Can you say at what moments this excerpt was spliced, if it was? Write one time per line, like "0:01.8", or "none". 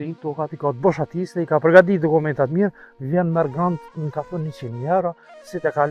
none